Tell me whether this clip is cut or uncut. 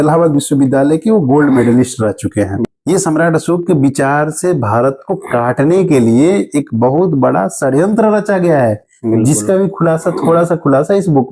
cut